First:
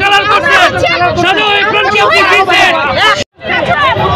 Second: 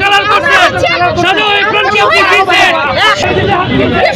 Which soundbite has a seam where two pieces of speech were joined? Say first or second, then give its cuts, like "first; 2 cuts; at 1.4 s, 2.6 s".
second; 1 cut; at 3.2 s